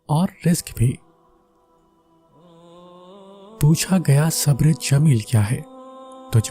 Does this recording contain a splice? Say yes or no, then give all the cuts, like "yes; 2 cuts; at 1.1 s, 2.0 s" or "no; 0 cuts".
yes; 2 cuts; at 1.0 s, 3.6 s